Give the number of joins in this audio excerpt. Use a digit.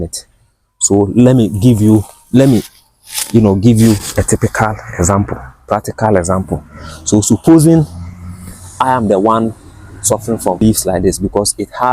1